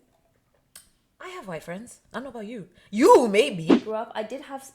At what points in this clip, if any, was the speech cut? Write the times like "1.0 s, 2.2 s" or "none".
3.8 s